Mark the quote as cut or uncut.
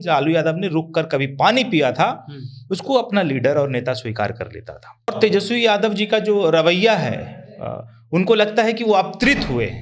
cut